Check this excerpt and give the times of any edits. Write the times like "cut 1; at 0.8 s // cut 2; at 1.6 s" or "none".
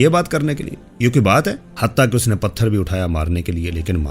cut 1; at 1.7 s